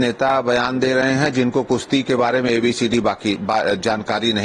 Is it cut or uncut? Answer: uncut